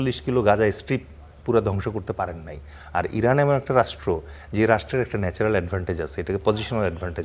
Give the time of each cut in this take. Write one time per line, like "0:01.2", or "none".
none